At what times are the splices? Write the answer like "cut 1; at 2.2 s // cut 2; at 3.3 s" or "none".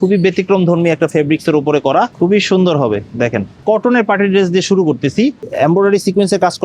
cut 1; at 2.1 s // cut 2; at 3.6 s // cut 3; at 5.4 s